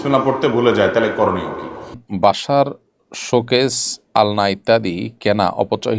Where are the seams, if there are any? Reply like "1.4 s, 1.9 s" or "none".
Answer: 2.0 s